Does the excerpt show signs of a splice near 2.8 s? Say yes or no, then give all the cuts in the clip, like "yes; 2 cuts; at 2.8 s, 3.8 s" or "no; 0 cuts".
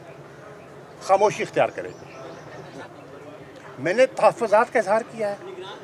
yes; 1 cut; at 2.8 s